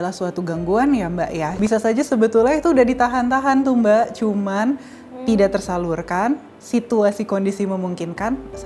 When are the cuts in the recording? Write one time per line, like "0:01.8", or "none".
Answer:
0:01.5